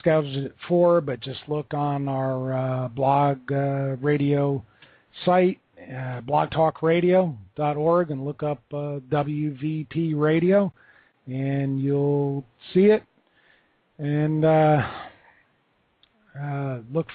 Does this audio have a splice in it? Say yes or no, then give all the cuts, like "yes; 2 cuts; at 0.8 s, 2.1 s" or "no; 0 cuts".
no; 0 cuts